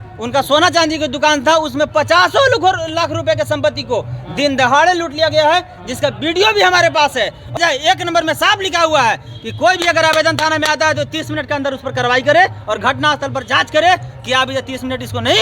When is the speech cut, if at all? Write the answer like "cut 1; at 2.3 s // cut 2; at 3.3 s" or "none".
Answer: cut 1; at 7.5 s